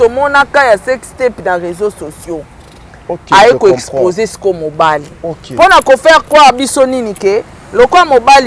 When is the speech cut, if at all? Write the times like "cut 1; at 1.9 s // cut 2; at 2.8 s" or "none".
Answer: none